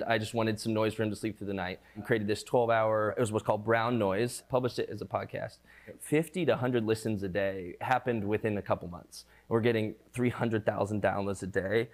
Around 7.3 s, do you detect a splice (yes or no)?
no